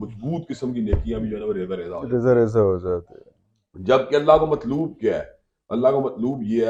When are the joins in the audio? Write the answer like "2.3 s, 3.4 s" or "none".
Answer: none